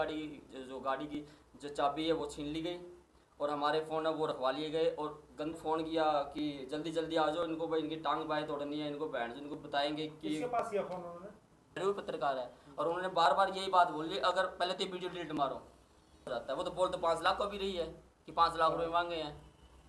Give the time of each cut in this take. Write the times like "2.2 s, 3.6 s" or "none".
5.5 s, 11.8 s, 16.3 s